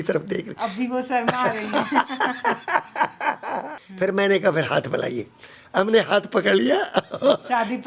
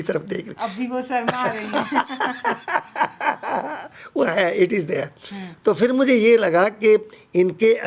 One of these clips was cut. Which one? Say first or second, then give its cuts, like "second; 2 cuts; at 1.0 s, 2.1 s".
first; 1 cut; at 3.8 s